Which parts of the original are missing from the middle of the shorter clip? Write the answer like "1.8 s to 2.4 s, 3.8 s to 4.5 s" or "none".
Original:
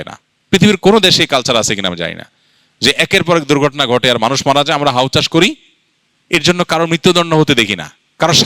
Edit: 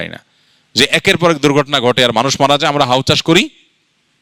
none